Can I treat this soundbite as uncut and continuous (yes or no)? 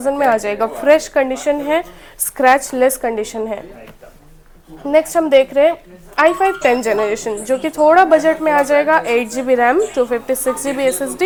yes